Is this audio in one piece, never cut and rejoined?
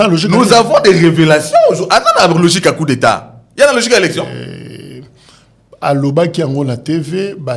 yes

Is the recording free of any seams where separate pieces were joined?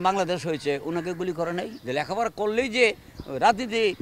no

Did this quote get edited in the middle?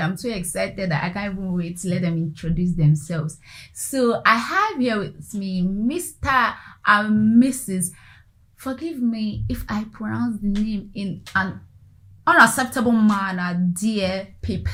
no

